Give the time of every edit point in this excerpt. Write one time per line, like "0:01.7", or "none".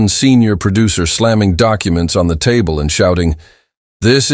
none